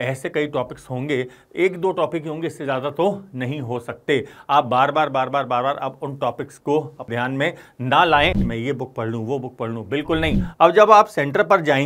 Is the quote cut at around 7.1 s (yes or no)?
yes